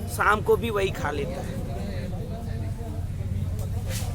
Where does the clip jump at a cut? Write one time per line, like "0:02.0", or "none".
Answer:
none